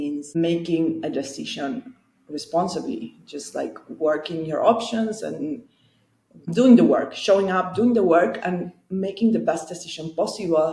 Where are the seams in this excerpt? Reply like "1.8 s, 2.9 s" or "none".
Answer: none